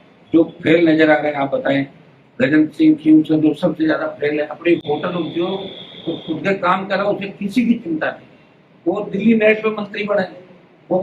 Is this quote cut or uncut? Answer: uncut